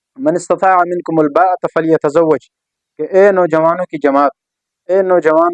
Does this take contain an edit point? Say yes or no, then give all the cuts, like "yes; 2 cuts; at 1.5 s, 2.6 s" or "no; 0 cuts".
no; 0 cuts